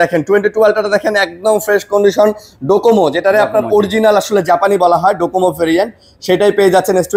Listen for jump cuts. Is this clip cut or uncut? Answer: uncut